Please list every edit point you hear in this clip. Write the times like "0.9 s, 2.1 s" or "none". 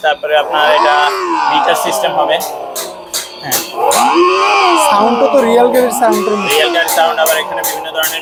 none